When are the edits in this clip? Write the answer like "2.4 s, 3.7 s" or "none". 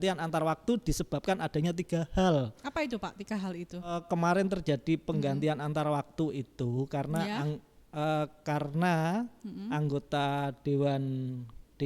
4.0 s